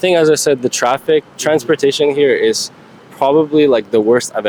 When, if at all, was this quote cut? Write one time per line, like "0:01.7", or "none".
none